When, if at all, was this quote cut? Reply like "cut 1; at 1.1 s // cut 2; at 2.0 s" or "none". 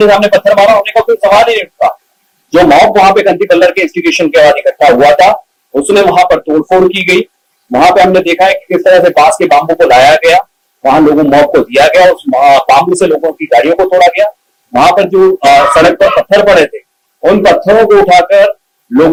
none